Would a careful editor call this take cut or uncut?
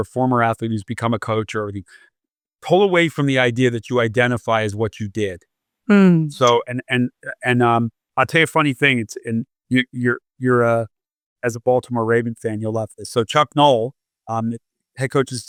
uncut